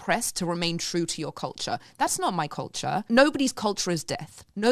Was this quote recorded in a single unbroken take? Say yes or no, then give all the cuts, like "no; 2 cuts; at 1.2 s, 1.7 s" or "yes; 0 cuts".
no; 1 cut; at 3.0 s